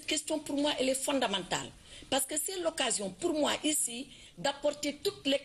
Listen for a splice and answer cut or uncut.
cut